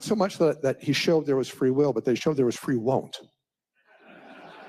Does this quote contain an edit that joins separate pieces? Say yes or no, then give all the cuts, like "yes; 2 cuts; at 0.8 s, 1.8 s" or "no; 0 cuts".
no; 0 cuts